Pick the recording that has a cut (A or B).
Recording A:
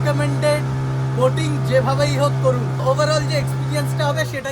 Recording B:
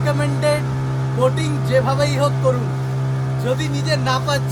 A